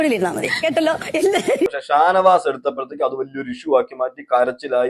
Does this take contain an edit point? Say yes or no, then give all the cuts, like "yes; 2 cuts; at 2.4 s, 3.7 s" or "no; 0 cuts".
yes; 1 cut; at 1.7 s